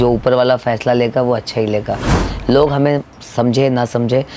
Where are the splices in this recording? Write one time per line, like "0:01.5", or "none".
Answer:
0:02.2